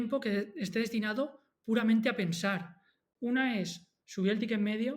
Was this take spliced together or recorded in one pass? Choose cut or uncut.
cut